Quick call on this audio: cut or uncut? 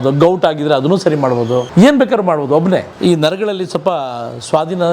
cut